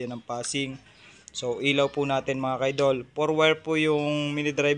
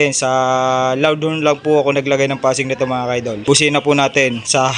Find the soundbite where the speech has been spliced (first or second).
second